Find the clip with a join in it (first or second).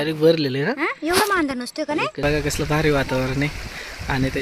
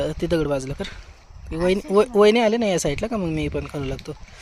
first